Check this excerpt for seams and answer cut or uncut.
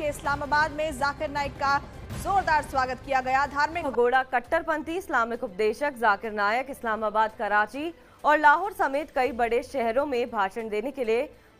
cut